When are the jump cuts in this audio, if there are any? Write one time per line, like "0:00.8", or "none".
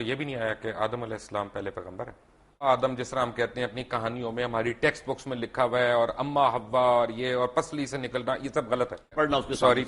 0:02.6
0:09.1